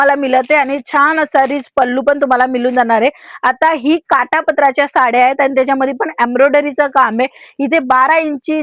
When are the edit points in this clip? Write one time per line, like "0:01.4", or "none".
none